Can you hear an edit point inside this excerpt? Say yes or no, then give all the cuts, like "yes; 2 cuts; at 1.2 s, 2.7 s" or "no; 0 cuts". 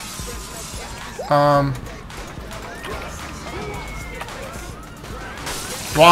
no; 0 cuts